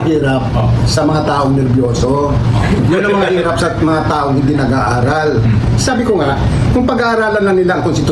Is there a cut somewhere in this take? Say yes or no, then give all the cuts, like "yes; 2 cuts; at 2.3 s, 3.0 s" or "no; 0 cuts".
no; 0 cuts